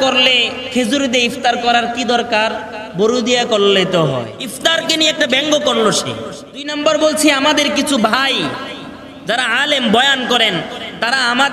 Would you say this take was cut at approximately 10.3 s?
no; 2 cuts; at 4.4 s, 6.7 s

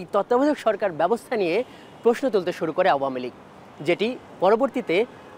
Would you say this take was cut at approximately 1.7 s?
no; 0 cuts

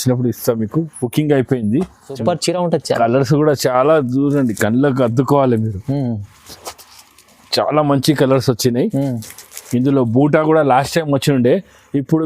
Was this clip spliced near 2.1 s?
yes; 1 cut; at 2.1 s

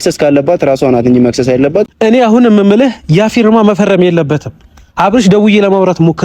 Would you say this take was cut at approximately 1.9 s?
yes; 1 cut; at 1.9 s

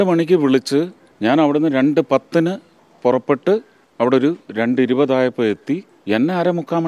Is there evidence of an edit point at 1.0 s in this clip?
yes; 3 cuts; at 1.0 s, 3.8 s, 5.9 s

